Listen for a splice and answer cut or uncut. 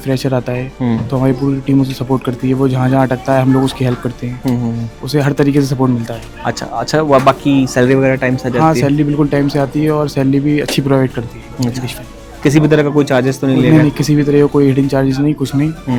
uncut